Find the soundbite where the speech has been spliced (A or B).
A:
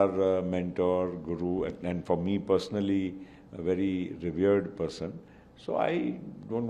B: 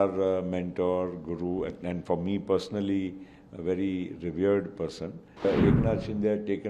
B